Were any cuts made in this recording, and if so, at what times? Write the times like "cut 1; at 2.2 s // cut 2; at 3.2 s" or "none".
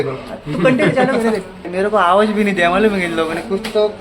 cut 1; at 1.6 s